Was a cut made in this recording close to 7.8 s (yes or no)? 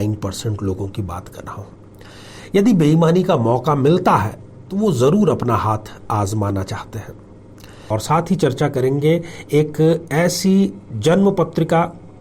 yes